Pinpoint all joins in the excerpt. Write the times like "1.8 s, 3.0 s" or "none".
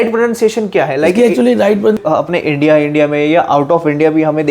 2.0 s